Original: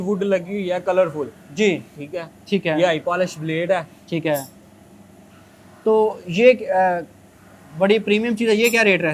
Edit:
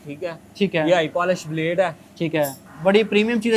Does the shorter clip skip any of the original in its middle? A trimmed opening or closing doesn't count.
yes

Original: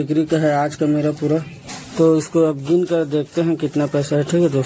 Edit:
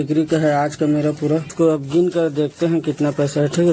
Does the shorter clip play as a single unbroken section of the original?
no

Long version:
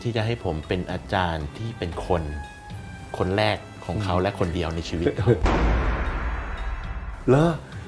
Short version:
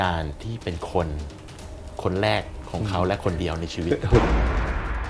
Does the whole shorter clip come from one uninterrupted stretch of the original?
no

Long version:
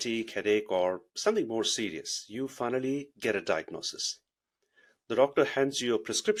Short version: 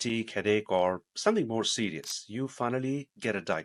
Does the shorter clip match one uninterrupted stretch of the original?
yes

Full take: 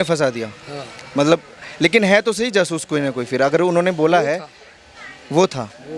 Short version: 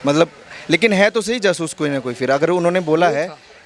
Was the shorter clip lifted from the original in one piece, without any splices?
yes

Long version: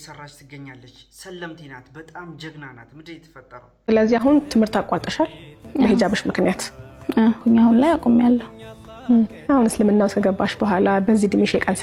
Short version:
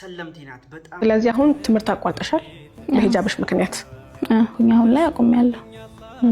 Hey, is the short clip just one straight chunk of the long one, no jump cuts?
no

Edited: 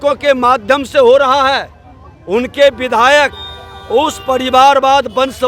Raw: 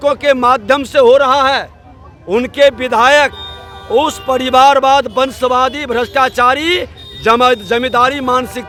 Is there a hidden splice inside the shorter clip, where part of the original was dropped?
no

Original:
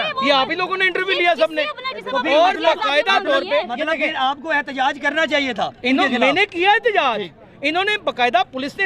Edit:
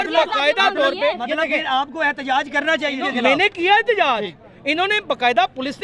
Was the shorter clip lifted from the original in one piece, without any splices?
no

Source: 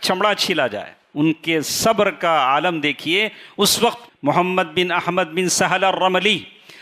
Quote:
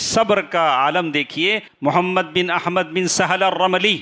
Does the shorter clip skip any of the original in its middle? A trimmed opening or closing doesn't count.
yes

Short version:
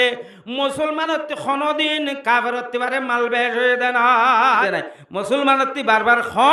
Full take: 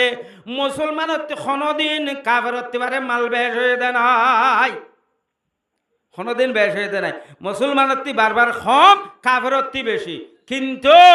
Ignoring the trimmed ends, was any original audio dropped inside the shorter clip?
yes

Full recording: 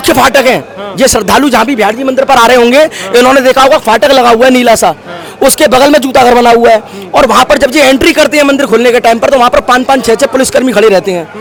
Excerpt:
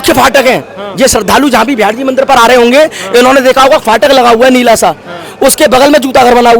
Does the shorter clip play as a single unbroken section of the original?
yes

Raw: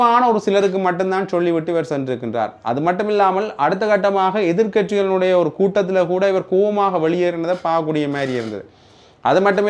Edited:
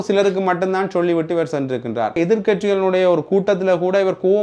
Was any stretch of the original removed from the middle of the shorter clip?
yes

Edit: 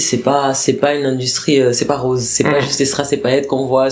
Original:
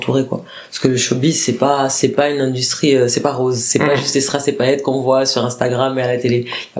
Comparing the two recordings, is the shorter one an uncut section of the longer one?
yes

